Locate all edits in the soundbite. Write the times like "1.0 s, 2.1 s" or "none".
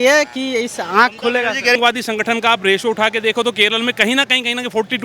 1.8 s